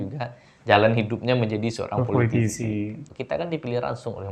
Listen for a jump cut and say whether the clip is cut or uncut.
cut